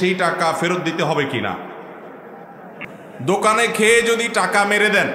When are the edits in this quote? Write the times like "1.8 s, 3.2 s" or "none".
2.8 s